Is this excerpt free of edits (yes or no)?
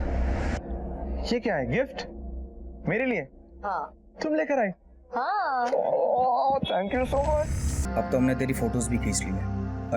no